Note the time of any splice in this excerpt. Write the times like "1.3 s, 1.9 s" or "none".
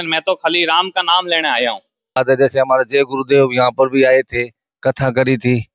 2.2 s